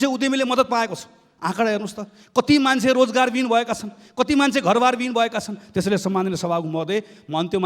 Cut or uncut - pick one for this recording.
uncut